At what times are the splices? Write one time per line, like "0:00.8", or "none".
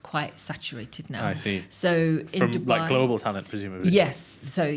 none